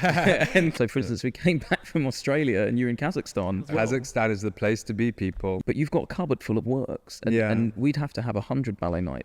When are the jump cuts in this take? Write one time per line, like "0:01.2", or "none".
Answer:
0:00.7
0:03.7
0:05.6